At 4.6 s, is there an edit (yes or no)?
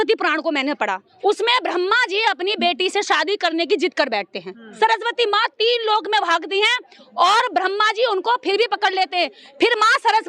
yes